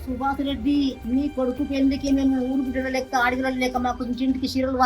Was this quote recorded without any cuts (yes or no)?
no